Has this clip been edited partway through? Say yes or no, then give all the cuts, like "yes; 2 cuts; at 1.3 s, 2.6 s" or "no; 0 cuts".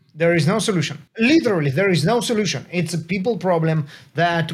yes; 1 cut; at 1.0 s